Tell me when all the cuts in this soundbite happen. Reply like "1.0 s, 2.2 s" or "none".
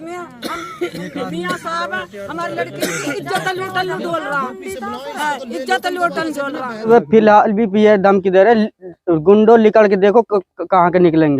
6.9 s